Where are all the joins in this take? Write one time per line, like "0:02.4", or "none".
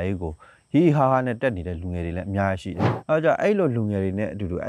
0:02.9